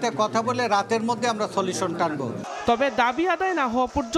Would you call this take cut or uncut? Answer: uncut